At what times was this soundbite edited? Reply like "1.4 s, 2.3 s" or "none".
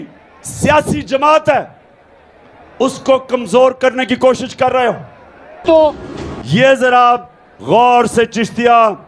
5.6 s